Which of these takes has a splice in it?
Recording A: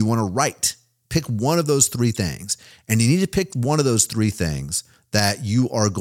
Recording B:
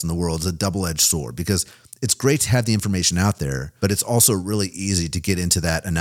B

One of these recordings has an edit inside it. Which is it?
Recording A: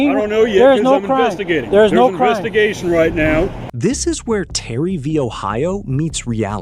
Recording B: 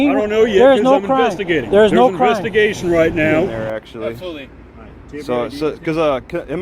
B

